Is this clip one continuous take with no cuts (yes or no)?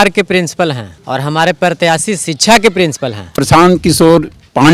no